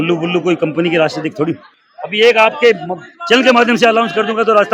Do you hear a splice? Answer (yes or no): yes